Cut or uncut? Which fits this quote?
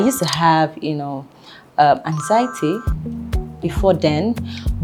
uncut